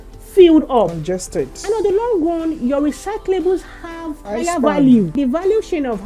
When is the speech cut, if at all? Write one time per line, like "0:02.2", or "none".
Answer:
0:04.2
0:05.1